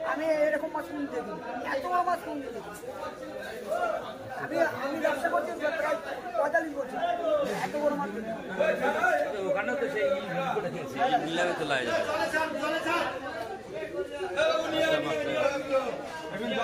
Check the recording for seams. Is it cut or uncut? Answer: uncut